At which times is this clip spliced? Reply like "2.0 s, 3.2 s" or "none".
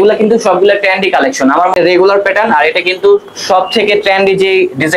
1.7 s